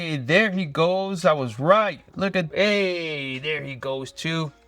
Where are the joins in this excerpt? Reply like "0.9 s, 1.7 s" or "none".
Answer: 2.5 s